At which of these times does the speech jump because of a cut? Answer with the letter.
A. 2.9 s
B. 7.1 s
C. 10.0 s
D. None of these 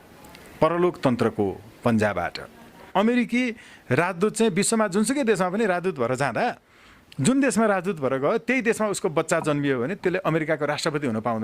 A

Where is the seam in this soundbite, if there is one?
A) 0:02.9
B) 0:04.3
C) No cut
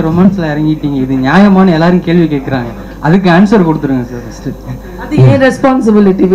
C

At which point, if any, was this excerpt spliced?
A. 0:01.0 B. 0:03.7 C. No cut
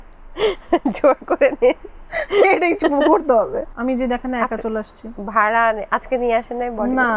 B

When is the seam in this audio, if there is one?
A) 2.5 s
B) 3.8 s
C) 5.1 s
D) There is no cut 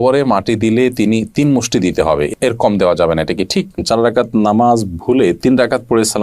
B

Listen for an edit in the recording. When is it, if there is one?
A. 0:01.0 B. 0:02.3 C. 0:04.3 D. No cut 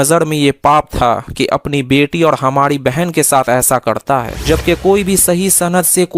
C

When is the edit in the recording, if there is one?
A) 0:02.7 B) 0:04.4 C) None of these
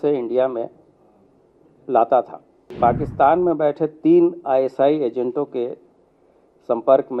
A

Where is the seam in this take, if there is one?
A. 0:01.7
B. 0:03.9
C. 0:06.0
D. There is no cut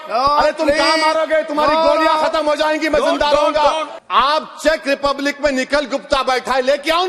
B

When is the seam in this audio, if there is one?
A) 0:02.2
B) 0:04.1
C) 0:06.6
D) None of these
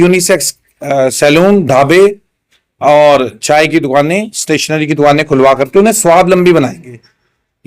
D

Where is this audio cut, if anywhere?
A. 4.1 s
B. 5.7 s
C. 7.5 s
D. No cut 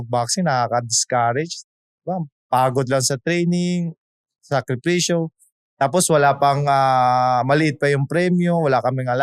D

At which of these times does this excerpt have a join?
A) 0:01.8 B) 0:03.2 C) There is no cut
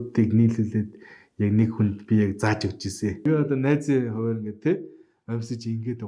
B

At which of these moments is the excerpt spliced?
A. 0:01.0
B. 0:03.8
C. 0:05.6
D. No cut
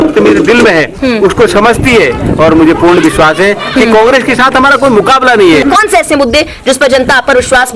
C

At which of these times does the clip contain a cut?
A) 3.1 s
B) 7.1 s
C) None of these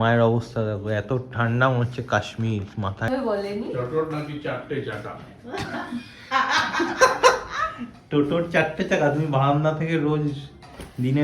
A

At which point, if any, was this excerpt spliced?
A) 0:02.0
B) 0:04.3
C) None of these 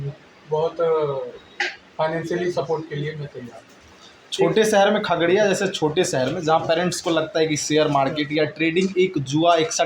C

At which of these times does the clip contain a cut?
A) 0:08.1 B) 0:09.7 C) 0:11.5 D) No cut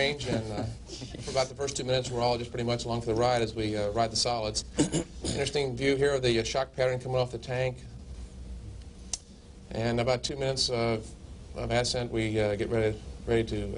C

